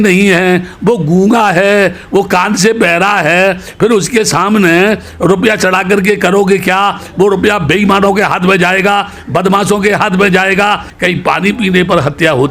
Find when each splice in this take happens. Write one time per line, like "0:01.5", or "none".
0:10.9